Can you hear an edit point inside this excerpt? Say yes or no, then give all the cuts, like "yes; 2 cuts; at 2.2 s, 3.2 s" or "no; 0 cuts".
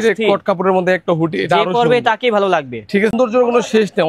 yes; 1 cut; at 3.1 s